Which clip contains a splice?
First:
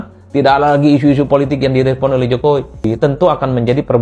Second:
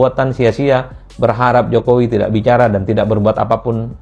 first; 1 cut; at 2.9 s

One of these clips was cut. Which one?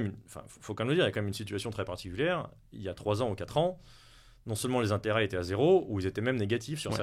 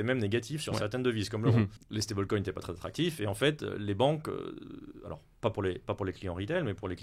second; 1 cut; at 1.8 s

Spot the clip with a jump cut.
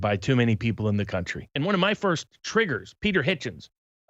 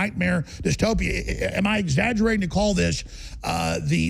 first; 1 cut; at 1.5 s

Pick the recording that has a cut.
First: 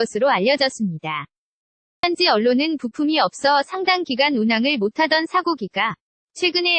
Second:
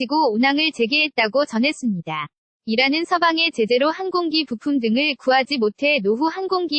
first; 1 cut; at 2.0 s

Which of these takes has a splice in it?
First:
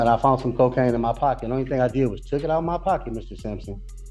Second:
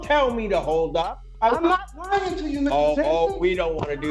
second; 1 cut; at 1.3 s

